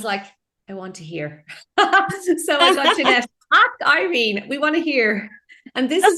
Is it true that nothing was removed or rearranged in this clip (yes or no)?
yes